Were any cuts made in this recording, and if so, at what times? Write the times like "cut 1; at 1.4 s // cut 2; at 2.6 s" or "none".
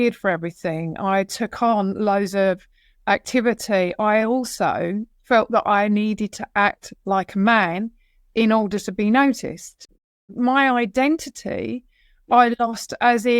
cut 1; at 10.3 s